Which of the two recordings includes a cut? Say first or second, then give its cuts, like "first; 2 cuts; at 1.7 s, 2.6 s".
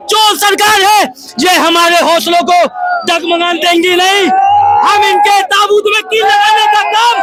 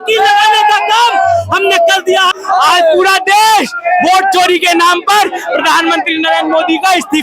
second; 1 cut; at 2.4 s